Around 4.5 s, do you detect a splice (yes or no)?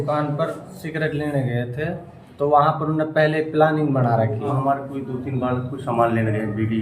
yes